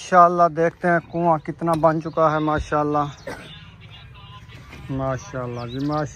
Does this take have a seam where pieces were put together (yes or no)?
no